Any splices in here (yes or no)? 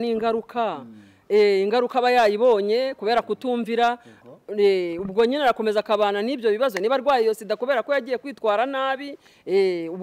no